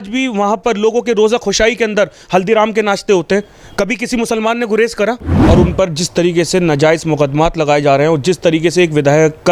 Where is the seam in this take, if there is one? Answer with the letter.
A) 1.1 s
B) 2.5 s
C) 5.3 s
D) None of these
C